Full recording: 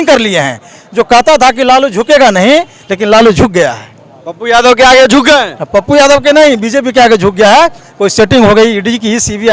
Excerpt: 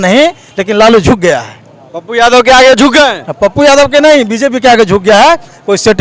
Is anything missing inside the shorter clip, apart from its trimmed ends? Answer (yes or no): no